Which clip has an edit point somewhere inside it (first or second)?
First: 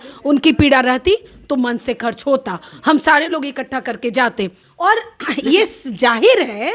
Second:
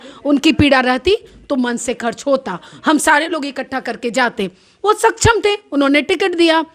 first